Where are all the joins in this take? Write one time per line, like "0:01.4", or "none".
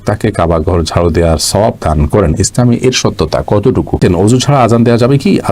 0:04.0